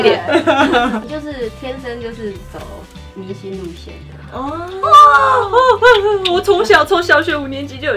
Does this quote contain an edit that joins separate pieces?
yes; 1 cut; at 1.1 s

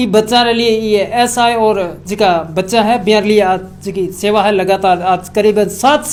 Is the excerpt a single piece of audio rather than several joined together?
yes; 0 cuts

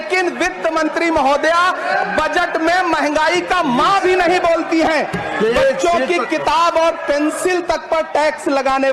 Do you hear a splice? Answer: no; 0 cuts

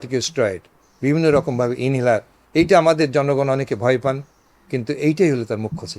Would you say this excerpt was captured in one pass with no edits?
yes; 0 cuts

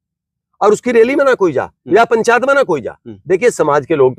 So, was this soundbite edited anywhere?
no; 0 cuts

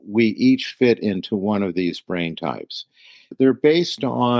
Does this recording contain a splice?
yes; 1 cut; at 3.3 s

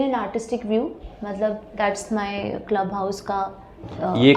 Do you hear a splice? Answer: no; 0 cuts

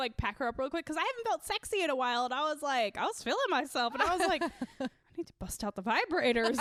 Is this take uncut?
yes; 0 cuts

